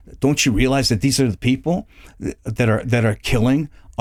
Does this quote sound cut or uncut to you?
uncut